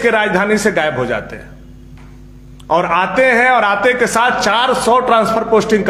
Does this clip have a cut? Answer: no; 0 cuts

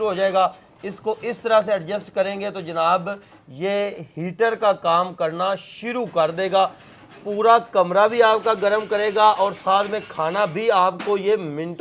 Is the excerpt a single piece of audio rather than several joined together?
yes; 0 cuts

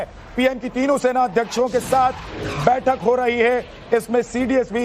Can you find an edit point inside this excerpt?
yes; 1 cut; at 1.3 s

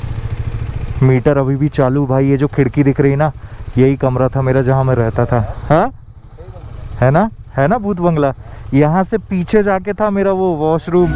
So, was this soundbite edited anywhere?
no; 0 cuts

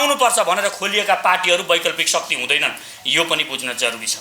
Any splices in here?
no; 0 cuts

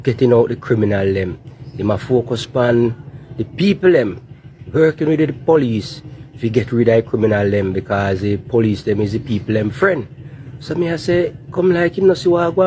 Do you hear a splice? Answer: no; 0 cuts

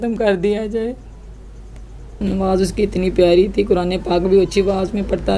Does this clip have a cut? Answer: yes; 1 cut; at 2.2 s

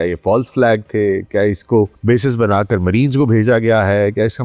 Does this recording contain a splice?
yes; 1 cut; at 2.0 s

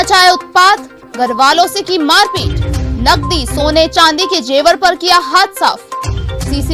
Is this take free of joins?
yes; 0 cuts

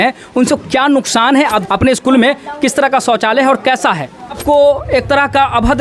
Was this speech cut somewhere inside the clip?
yes; 2 cuts; at 1.6 s, 4.4 s

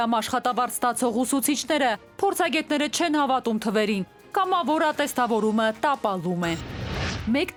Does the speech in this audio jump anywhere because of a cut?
no; 0 cuts

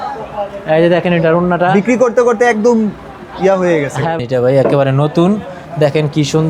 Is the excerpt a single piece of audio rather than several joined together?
no; 1 cut; at 4.2 s

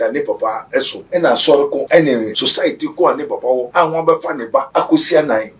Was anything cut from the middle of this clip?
yes; 4 cuts; at 1.0 s, 2.0 s, 3.7 s, 4.7 s

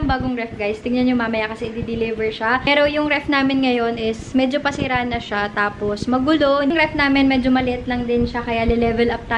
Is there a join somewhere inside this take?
no; 0 cuts

